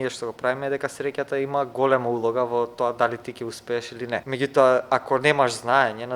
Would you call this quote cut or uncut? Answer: cut